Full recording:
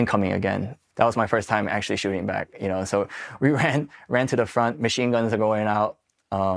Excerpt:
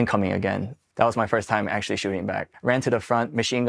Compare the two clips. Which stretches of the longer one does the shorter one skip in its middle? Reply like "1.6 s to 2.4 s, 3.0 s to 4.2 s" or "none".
2.5 s to 4.0 s